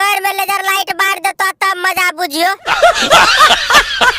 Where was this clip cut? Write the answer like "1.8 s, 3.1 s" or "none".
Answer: 2.6 s